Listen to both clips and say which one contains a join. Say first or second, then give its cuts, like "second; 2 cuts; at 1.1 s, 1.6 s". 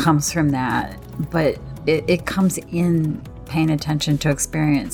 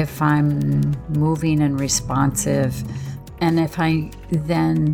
second; 2 cuts; at 1.0 s, 3.2 s